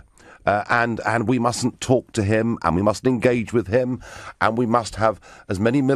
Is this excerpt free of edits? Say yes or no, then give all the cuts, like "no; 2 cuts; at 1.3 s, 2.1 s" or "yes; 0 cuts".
yes; 0 cuts